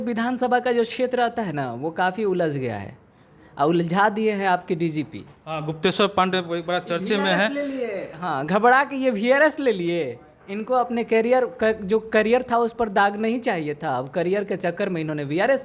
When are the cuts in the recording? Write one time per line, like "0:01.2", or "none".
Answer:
none